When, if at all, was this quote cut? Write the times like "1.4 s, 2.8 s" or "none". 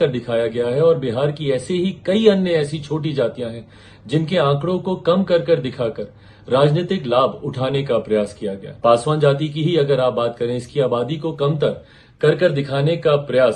8.7 s